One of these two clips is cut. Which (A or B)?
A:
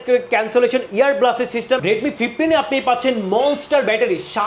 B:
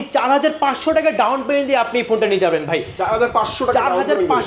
A